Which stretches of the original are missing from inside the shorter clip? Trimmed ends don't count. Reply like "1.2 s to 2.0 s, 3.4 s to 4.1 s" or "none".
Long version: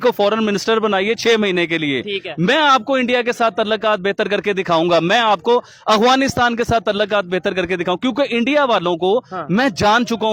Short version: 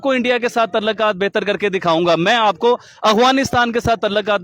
none